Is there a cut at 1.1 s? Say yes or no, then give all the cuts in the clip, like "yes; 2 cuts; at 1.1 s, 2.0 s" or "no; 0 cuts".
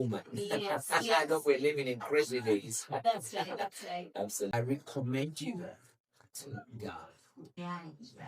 no; 1 cut; at 4.5 s